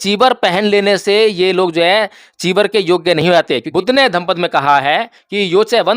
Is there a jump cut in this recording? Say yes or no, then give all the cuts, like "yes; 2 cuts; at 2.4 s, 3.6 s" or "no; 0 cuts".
yes; 1 cut; at 3.7 s